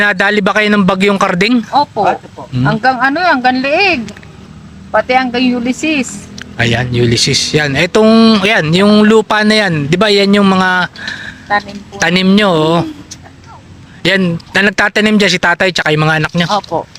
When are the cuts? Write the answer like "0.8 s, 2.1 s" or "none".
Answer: none